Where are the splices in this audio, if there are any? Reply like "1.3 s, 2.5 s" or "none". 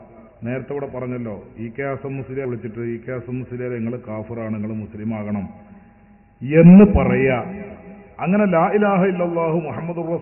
2.5 s

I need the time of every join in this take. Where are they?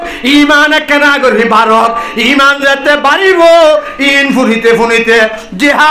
none

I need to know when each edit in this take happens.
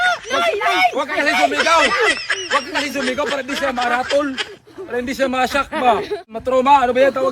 6.4 s

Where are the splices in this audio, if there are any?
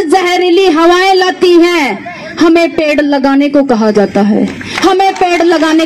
none

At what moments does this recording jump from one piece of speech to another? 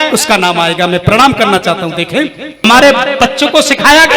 2.6 s

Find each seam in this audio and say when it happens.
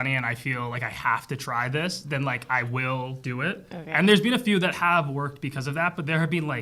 none

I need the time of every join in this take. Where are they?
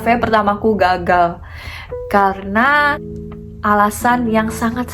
3.1 s

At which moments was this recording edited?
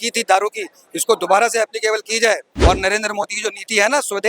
2.5 s

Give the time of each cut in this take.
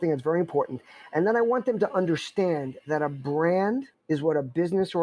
3.9 s

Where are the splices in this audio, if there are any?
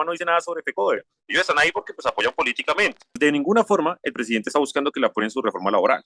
1.1 s, 3.2 s

